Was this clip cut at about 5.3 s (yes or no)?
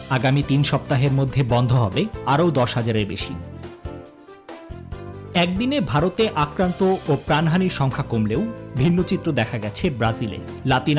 yes